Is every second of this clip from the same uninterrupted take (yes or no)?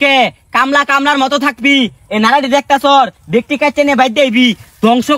yes